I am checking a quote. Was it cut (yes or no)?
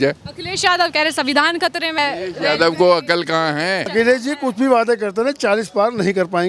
yes